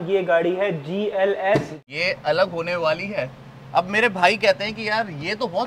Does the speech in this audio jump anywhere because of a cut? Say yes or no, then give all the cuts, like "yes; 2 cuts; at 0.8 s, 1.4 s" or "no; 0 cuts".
yes; 1 cut; at 1.8 s